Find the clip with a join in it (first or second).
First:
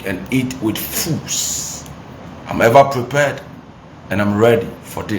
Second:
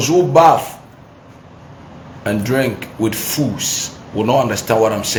first